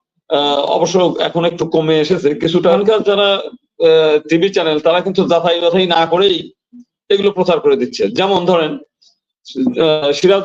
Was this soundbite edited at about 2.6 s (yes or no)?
yes